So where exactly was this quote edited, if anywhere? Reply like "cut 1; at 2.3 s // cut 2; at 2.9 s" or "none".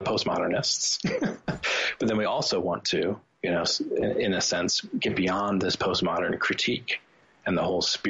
none